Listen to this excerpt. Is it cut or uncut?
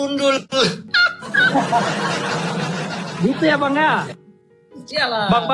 uncut